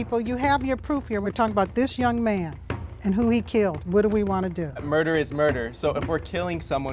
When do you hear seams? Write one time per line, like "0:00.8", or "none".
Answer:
0:01.2